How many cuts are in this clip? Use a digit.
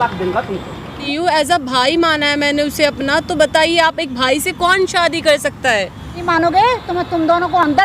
2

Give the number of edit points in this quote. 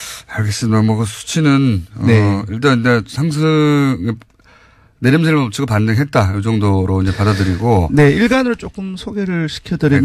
1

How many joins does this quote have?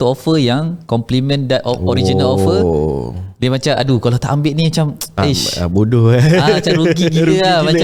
0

